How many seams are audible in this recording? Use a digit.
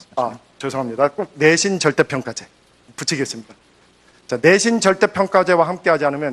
0